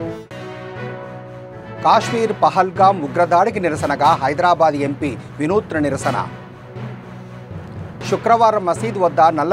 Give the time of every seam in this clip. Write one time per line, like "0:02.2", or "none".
0:01.0